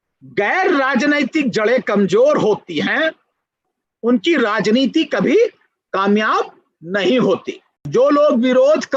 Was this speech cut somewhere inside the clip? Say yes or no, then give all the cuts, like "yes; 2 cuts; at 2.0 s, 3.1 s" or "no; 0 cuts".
yes; 1 cut; at 7.9 s